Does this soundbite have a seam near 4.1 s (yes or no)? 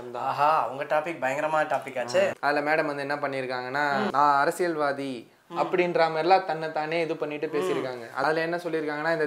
yes